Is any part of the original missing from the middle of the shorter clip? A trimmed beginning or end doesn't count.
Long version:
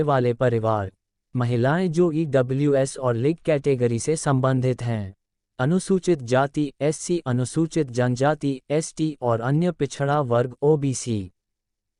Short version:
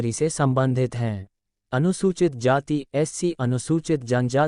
no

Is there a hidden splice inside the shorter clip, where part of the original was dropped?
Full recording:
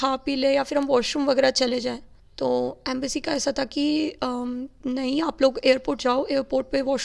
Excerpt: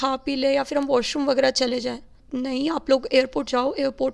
yes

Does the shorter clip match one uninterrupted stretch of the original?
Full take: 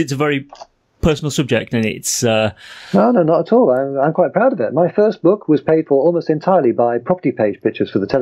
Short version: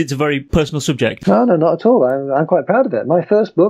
no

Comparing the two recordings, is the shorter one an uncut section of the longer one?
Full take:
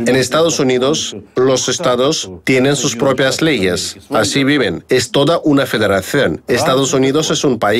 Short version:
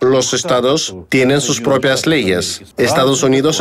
no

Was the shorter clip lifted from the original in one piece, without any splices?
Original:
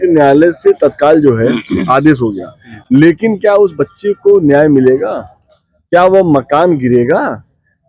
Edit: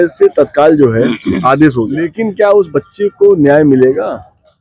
no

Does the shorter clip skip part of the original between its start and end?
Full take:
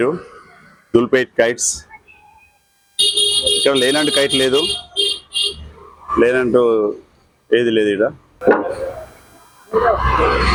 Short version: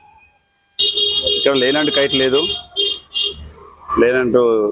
no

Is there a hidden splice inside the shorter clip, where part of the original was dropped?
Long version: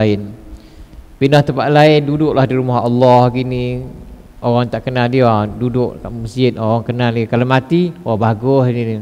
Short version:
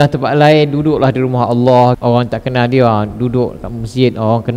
yes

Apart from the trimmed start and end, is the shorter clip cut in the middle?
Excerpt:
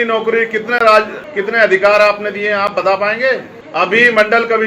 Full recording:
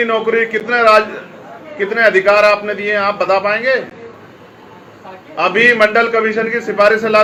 yes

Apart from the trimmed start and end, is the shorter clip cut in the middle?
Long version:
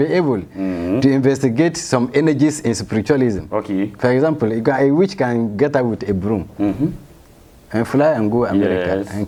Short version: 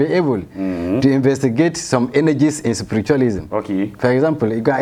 no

